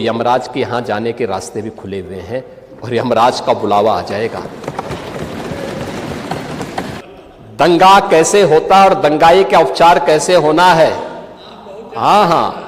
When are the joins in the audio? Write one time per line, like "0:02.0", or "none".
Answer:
0:07.0